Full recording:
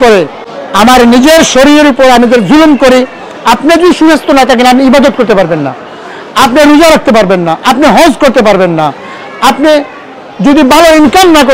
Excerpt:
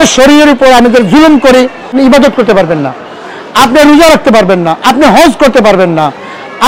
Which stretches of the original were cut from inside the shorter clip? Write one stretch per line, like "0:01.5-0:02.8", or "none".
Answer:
0:03.3-0:04.8